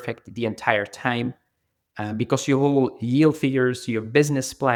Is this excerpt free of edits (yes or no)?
yes